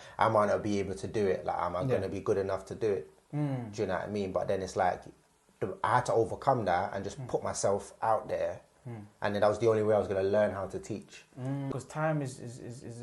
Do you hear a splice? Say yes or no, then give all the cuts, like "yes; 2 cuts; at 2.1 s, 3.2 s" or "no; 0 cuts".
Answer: yes; 1 cut; at 11.7 s